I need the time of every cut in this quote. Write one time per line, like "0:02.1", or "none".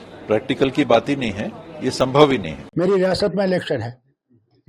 0:02.6